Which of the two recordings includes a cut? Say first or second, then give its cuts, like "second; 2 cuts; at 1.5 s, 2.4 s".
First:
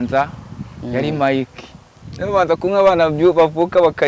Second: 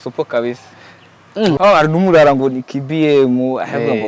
second; 1 cut; at 1.5 s